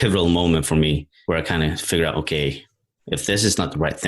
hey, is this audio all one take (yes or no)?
no